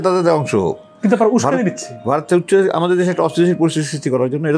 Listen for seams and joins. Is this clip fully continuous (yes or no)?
yes